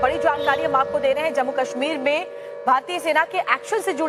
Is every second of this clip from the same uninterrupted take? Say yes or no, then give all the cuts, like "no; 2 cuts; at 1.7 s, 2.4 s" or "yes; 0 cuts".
yes; 0 cuts